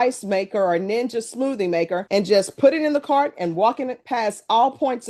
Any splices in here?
no; 0 cuts

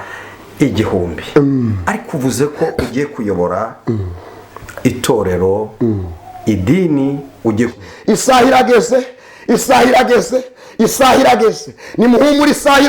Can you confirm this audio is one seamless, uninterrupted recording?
no; 1 cut; at 7.7 s

